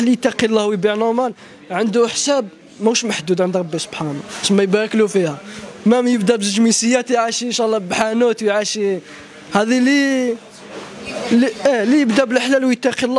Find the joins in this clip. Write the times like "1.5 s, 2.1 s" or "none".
none